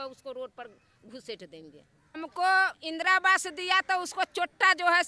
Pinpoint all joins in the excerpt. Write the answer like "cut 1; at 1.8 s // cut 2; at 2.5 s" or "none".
cut 1; at 2.2 s